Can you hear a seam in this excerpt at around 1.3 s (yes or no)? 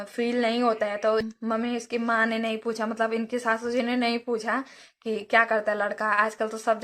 yes